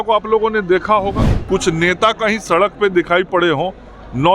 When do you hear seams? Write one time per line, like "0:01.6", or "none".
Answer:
0:01.3

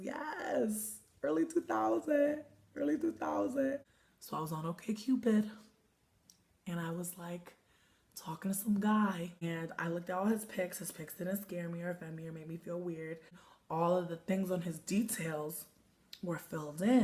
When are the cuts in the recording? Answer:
0:09.7

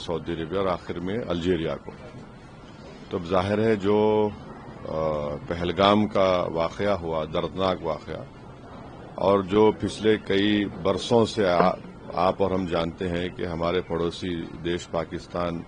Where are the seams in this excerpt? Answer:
none

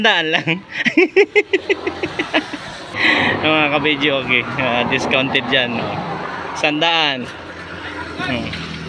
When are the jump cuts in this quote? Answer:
0:03.0

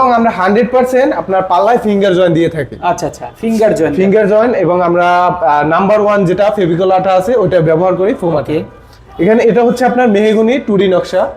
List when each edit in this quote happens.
none

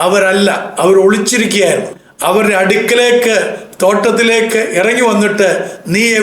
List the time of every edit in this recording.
0:02.0

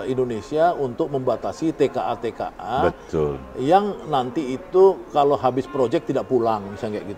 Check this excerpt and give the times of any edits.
none

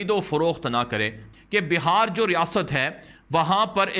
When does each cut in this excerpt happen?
0:01.4

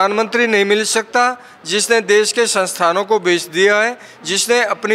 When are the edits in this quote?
none

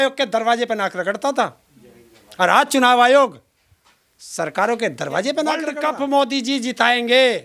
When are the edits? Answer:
0:05.7

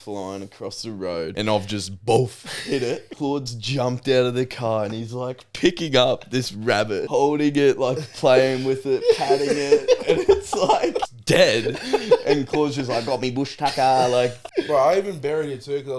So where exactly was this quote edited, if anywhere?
0:01.3
0:03.1
0:07.0
0:11.1
0:14.4

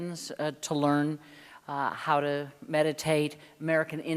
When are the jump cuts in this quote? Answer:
0:01.3

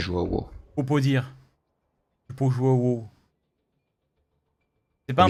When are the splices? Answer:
none

